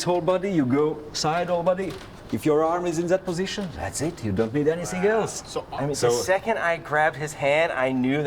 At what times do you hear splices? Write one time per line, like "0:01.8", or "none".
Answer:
0:05.6